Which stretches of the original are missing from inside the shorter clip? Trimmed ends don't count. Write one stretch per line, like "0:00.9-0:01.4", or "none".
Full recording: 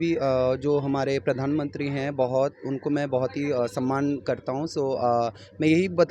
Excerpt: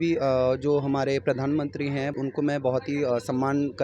0:02.1-0:02.6